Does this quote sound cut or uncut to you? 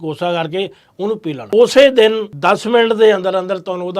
cut